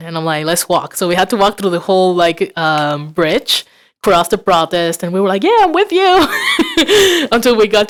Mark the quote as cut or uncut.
uncut